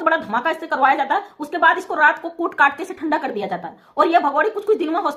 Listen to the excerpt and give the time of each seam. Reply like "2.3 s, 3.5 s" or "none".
none